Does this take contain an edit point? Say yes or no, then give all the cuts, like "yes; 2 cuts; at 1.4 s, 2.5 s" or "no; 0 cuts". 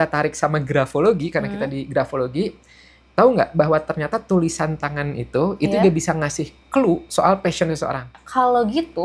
yes; 1 cut; at 8.1 s